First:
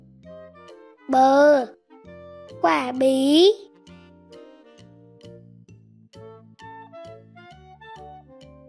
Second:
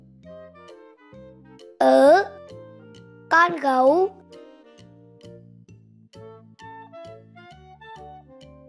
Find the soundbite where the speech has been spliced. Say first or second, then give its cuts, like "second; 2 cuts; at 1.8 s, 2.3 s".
first; 2 cuts; at 1.0 s, 4.1 s